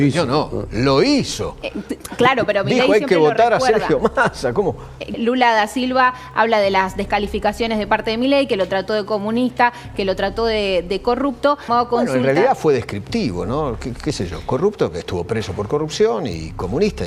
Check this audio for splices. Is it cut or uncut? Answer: cut